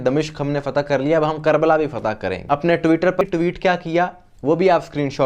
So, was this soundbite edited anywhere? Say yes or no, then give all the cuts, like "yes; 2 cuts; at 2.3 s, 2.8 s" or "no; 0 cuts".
yes; 2 cuts; at 2.4 s, 3.2 s